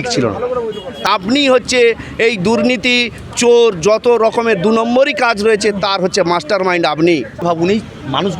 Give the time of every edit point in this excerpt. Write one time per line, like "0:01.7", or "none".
0:01.1
0:07.4